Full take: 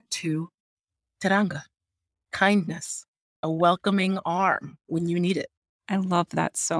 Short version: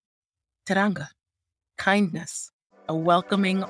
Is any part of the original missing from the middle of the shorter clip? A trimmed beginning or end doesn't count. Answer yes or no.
no